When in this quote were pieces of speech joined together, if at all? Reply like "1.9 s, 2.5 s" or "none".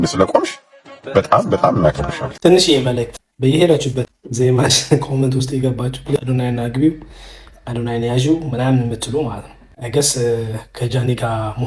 2.2 s